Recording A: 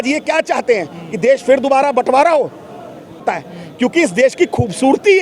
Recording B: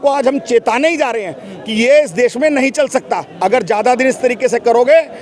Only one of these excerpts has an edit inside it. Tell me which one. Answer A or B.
A